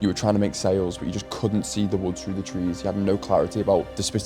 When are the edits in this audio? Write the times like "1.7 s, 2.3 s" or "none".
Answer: none